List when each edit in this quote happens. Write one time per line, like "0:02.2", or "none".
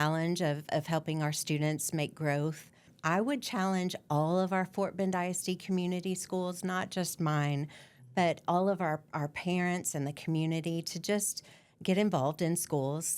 0:02.9